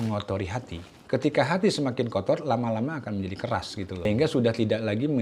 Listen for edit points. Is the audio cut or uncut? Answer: cut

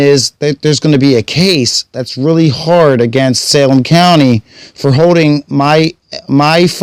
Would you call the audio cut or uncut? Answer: uncut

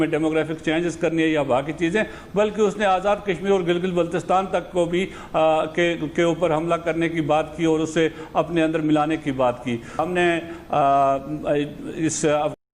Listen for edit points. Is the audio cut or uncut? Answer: cut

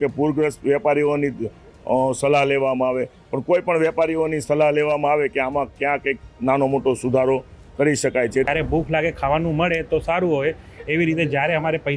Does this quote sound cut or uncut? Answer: cut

